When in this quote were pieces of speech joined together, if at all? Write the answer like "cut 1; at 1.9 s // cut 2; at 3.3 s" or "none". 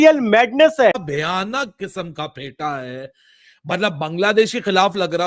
cut 1; at 0.9 s